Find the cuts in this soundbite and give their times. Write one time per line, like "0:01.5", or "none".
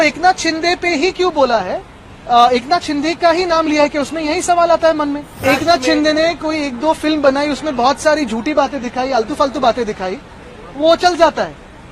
0:05.4